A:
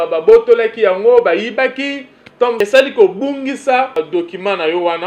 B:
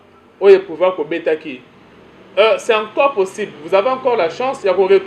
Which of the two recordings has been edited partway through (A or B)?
A